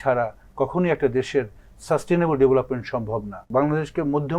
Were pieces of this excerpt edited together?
yes; 1 cut; at 3.4 s

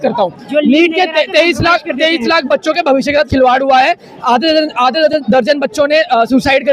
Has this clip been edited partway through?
no; 0 cuts

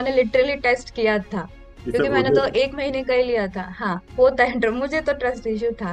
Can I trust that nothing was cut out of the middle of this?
yes; 0 cuts

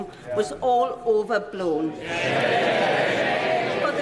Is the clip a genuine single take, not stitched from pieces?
yes; 0 cuts

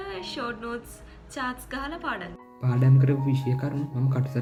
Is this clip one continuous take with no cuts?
yes; 0 cuts

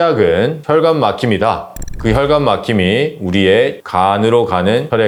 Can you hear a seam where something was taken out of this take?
no; 0 cuts

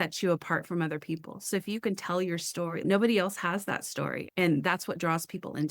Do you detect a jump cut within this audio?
yes; 2 cuts; at 2.8 s, 4.2 s

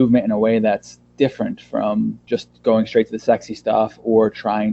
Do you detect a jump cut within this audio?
yes; 1 cut; at 2.2 s

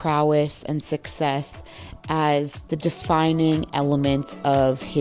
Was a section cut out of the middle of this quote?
no; 0 cuts

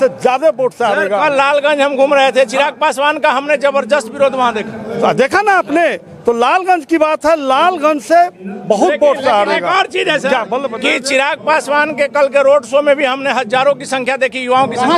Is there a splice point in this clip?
no; 0 cuts

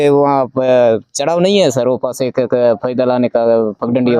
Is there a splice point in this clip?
no; 0 cuts

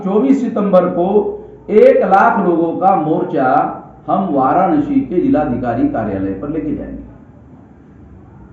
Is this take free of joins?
yes; 0 cuts

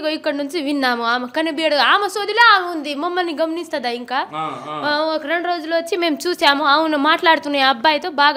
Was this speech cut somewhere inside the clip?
no; 0 cuts

